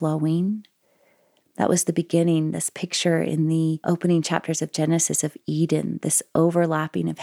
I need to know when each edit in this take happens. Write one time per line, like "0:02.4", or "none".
0:03.8